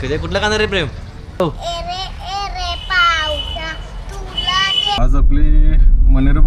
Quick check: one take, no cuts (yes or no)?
no